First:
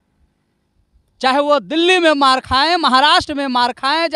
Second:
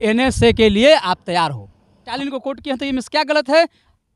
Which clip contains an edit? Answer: second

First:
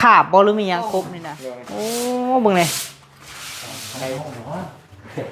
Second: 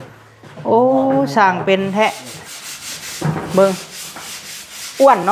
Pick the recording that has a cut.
first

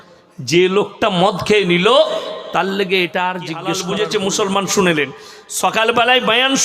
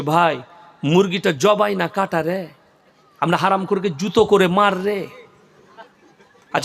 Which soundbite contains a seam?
first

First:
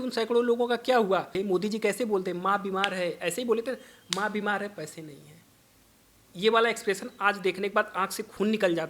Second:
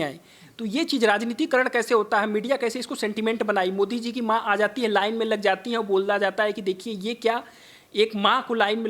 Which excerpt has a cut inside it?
first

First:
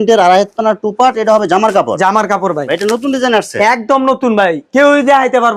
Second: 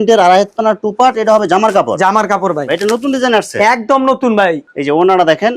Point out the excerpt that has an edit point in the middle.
second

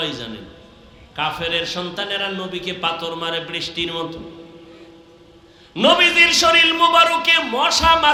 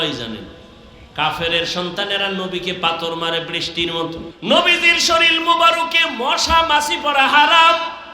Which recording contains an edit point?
second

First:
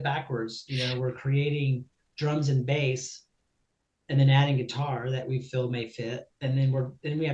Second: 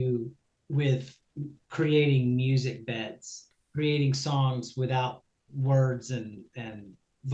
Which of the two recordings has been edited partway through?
second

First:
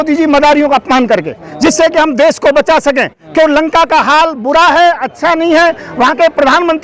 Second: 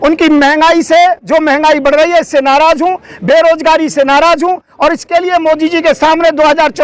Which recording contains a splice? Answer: first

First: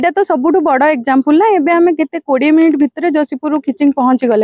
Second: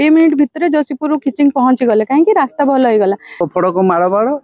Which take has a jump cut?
second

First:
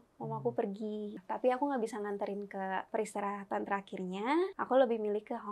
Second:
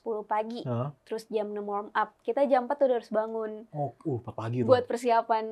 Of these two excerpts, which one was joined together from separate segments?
first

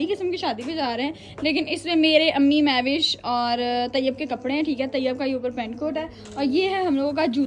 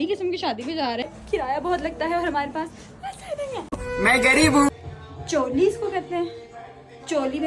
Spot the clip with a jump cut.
second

